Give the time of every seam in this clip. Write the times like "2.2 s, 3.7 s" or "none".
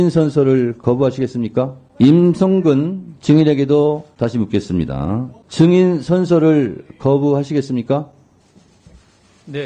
1.8 s, 4.1 s, 5.4 s